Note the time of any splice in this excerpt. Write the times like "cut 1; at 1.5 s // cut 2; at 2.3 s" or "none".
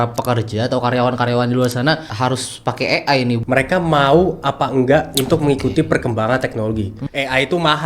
cut 1; at 2.1 s // cut 2; at 3.4 s // cut 3; at 7.0 s